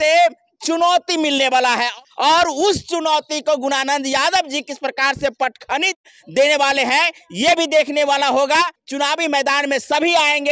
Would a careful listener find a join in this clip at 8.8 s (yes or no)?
yes